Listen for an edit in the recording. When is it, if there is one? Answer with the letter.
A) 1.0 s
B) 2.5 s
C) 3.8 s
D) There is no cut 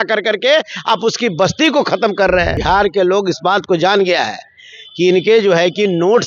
B